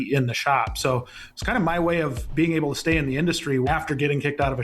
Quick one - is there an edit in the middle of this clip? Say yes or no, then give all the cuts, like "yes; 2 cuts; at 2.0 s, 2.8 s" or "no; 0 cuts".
yes; 1 cut; at 3.7 s